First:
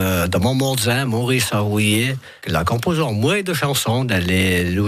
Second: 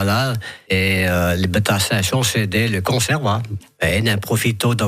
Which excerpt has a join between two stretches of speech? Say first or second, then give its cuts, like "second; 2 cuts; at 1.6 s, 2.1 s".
second; 1 cut; at 3.5 s